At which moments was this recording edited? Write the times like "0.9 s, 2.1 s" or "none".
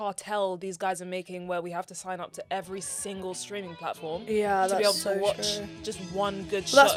none